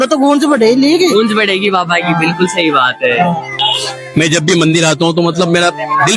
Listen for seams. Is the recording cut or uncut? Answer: cut